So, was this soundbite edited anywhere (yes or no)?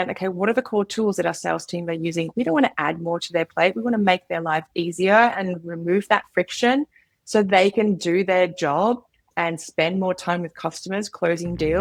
no